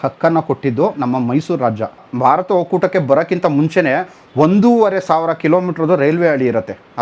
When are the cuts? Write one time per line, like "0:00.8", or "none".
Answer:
0:02.0